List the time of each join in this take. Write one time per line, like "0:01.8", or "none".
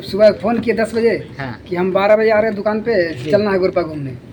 none